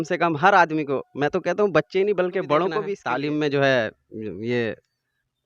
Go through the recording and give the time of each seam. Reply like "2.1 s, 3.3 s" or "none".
3.0 s